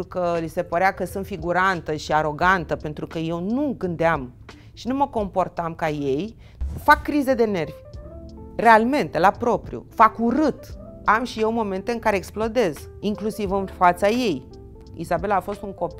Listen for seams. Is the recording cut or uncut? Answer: cut